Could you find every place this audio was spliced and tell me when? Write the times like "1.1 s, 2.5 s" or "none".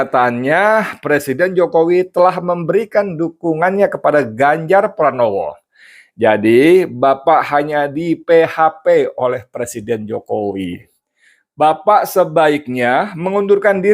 10.9 s